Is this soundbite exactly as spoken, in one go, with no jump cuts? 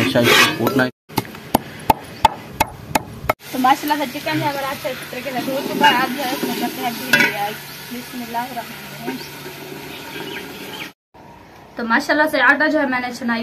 no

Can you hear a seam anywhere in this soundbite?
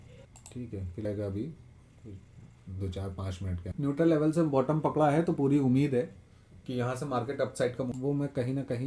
yes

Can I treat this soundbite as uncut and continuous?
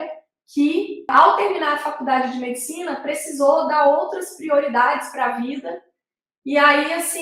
no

